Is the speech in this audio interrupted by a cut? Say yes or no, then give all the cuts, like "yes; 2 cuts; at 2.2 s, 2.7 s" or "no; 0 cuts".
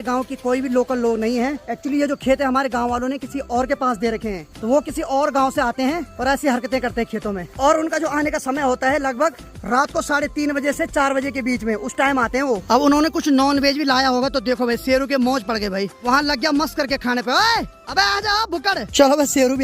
no; 0 cuts